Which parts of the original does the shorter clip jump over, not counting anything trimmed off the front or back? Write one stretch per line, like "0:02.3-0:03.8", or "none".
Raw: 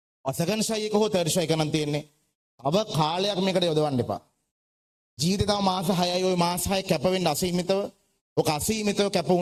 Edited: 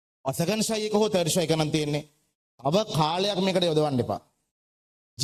none